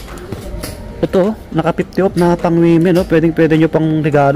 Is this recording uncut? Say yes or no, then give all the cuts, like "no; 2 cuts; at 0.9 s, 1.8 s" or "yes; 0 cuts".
yes; 0 cuts